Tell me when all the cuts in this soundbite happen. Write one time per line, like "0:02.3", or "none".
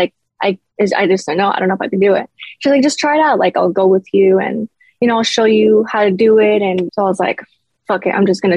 0:06.9